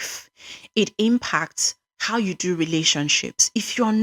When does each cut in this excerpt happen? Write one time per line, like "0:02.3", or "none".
none

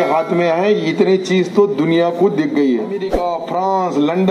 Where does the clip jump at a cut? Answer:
0:03.2

